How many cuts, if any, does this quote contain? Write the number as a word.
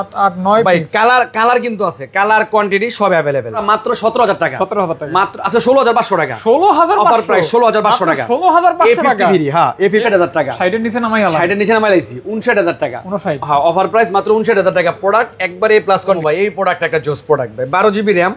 three